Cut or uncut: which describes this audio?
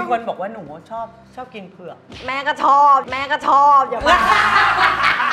uncut